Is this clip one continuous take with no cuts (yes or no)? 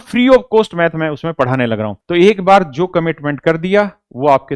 no